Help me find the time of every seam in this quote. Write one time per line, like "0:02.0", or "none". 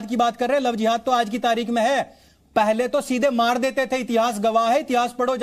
none